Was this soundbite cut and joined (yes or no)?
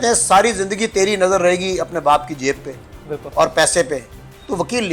no